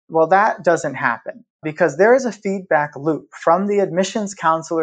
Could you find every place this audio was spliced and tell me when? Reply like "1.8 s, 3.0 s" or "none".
1.7 s